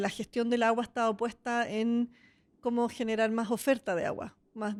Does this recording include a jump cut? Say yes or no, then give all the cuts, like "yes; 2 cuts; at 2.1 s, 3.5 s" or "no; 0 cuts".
no; 0 cuts